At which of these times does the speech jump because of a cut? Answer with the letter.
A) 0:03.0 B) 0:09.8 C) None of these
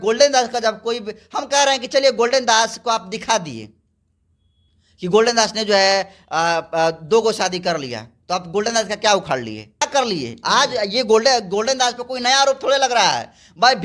B